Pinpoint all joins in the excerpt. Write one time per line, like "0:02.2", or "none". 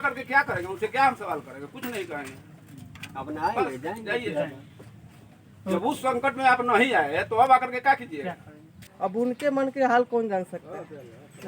0:08.9